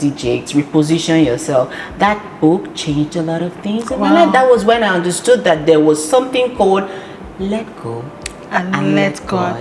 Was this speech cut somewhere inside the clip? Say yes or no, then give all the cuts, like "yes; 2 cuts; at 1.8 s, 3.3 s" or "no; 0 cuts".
no; 0 cuts